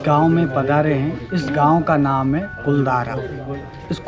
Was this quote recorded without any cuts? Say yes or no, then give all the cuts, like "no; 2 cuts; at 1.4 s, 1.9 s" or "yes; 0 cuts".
yes; 0 cuts